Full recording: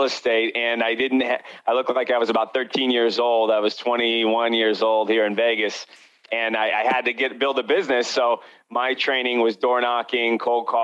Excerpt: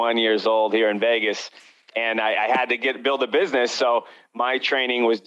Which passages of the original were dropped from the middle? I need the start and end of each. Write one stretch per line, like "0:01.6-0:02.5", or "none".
none